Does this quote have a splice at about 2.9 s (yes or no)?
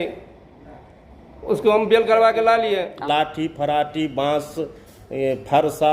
yes